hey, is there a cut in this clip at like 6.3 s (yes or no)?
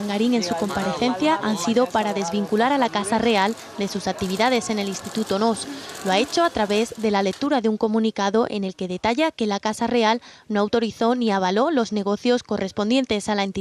no